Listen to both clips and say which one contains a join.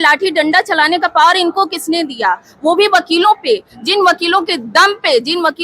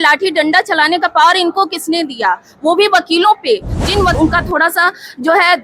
second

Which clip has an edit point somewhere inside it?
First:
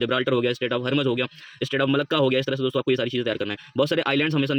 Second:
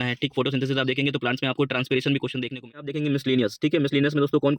second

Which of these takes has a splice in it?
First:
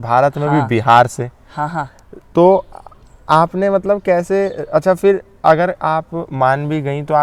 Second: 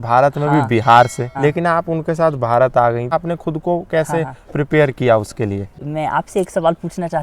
second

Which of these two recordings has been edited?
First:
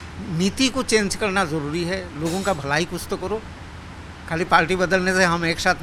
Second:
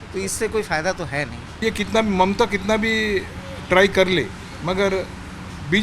second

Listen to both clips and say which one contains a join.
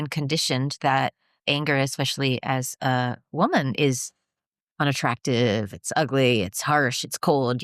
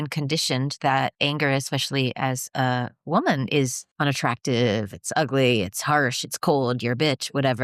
second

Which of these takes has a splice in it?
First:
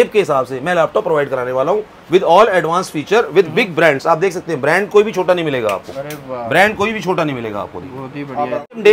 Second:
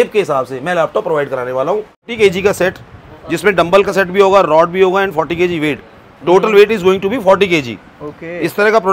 second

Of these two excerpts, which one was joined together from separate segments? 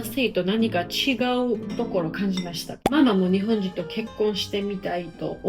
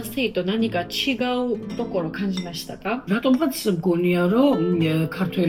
first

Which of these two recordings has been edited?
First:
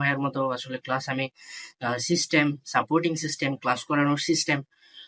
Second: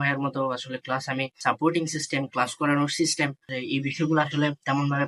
second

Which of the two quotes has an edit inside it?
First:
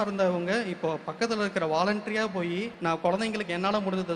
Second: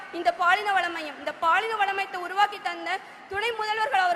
first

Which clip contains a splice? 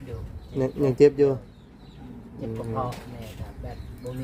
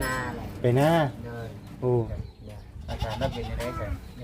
second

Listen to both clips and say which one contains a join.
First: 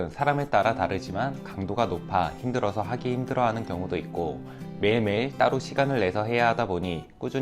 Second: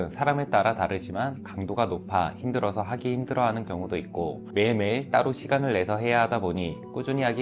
second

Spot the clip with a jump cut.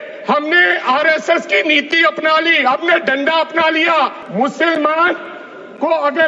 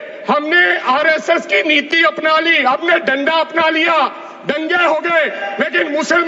first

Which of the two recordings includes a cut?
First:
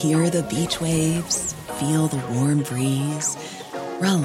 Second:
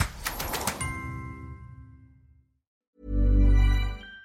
second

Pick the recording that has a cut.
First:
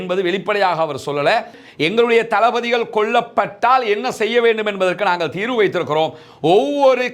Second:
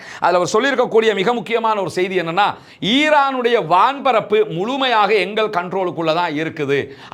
first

